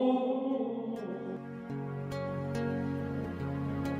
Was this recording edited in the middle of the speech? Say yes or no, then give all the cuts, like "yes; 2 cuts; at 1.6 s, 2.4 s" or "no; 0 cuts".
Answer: yes; 1 cut; at 1.3 s